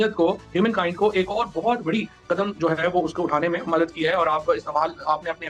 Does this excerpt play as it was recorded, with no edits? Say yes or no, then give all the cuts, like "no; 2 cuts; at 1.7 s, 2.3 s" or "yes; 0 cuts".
yes; 0 cuts